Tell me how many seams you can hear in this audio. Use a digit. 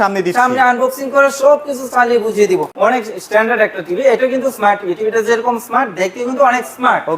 1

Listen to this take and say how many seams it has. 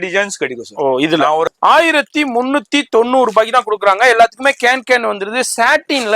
1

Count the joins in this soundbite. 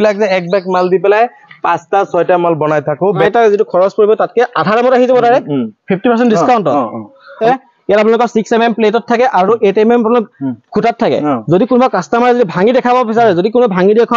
2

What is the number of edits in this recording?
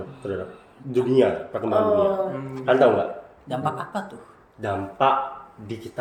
0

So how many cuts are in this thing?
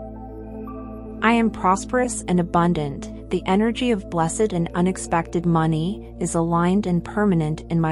1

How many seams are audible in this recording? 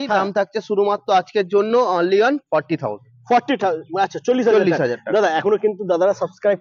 0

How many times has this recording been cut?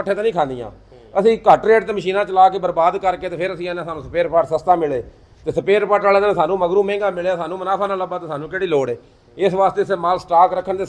0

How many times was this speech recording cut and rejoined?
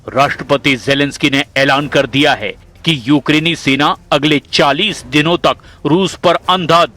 1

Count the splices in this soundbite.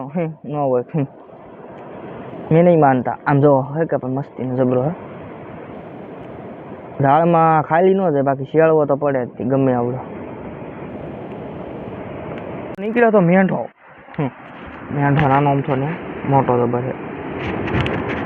1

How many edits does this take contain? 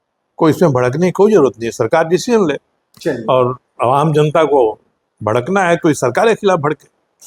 0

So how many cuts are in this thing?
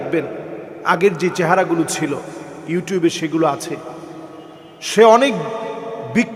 0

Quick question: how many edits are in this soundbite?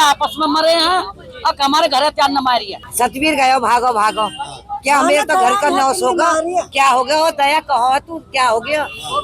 1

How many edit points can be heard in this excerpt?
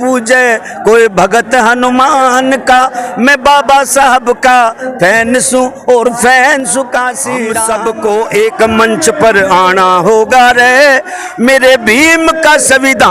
1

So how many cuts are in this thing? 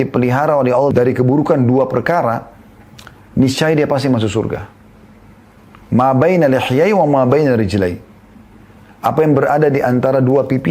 1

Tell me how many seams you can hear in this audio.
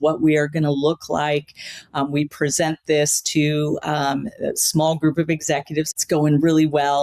1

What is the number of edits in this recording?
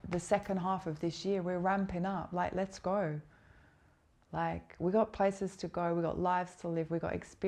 0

